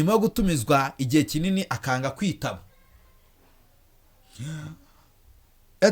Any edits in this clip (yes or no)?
no